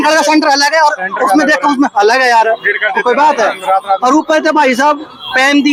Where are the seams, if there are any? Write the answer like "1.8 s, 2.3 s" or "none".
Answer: none

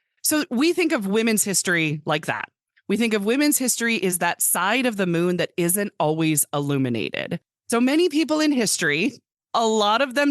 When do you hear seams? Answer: 7.3 s

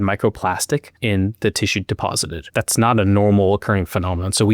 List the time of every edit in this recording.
0.9 s, 2.3 s

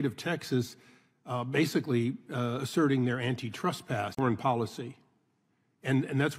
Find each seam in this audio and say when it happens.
none

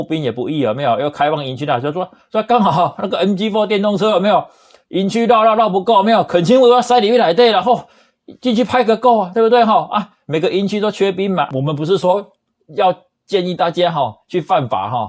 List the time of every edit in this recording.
11.5 s

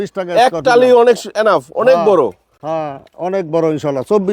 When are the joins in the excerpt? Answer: none

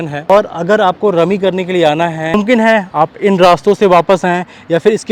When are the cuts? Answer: 2.3 s

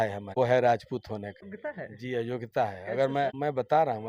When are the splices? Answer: none

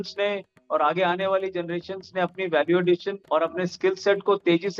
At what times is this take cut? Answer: 3.1 s

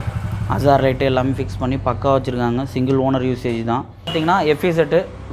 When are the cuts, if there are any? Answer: 4.2 s

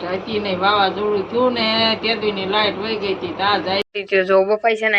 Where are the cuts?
3.8 s

